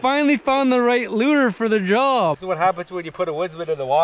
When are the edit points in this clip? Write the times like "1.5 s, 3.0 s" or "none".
2.4 s

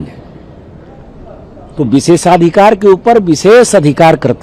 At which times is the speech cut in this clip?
none

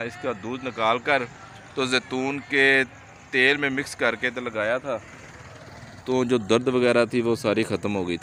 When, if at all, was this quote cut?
none

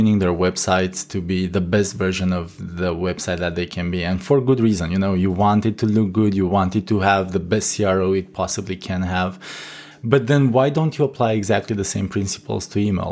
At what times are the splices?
none

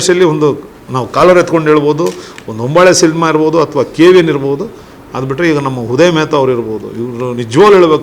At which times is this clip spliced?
none

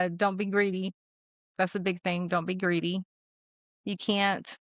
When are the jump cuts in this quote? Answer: none

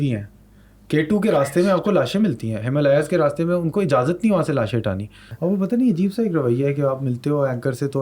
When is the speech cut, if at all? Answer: 5.2 s

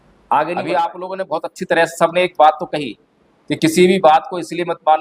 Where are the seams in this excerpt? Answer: 1.0 s

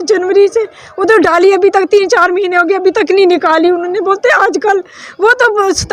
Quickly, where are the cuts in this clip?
none

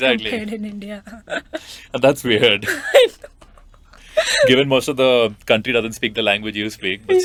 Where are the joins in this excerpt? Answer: none

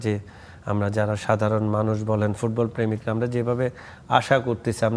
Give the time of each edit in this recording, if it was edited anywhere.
none

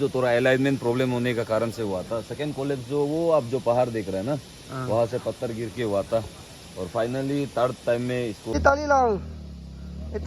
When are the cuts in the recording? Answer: 8.5 s

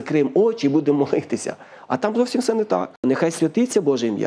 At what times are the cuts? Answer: 3.0 s

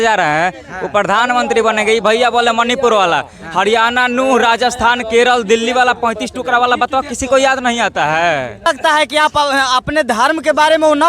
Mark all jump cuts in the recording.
8.7 s

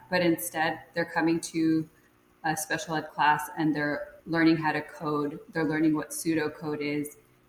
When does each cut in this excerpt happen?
none

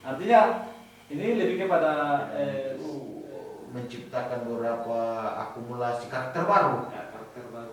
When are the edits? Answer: 2.8 s

